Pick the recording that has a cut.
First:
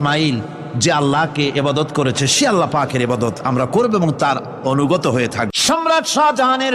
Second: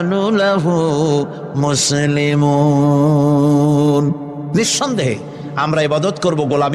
first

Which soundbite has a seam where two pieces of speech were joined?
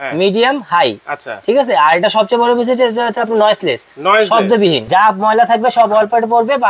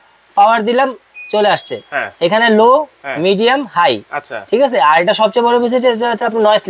first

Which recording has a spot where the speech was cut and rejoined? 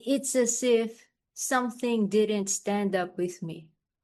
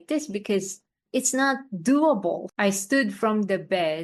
second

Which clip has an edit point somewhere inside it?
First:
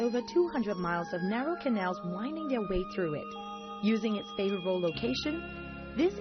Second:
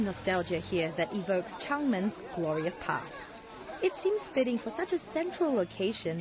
first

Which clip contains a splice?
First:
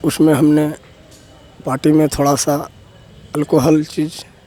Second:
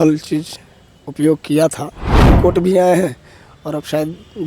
second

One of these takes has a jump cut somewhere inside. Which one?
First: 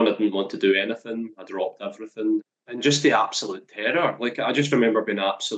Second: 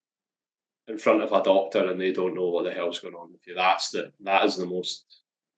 first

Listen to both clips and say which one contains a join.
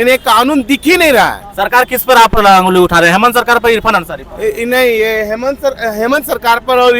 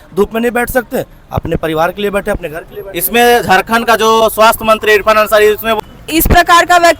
second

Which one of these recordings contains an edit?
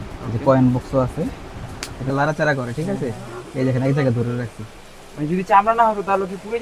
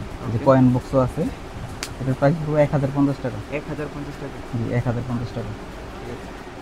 first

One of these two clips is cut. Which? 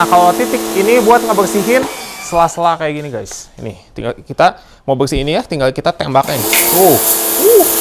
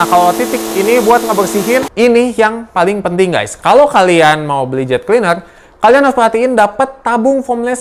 second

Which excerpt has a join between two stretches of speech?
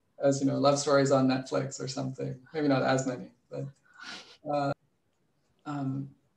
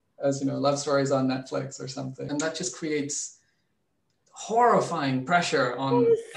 second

